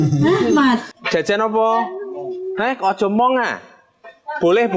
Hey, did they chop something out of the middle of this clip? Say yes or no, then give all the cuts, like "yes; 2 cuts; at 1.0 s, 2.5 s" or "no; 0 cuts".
yes; 1 cut; at 0.9 s